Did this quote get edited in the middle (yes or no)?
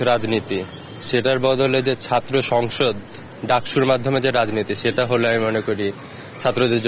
no